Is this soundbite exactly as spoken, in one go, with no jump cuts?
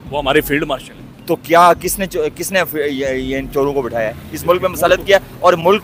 yes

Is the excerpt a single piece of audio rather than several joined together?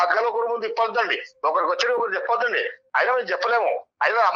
yes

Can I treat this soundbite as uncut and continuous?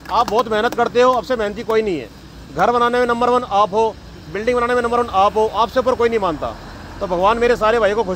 yes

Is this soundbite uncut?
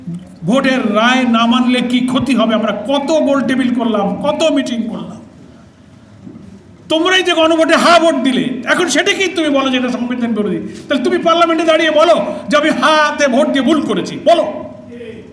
yes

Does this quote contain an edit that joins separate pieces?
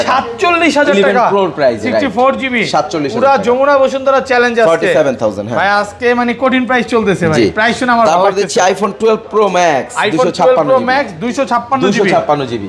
no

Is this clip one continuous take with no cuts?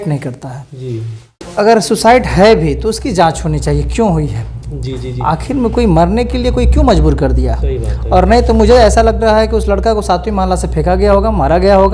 no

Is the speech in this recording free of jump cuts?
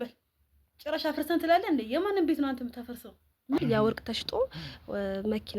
no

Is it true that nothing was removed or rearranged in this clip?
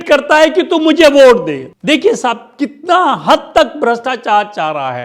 no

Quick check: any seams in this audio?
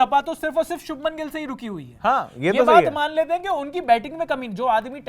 no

